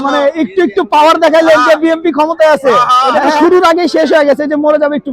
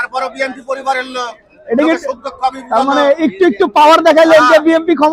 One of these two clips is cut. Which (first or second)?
first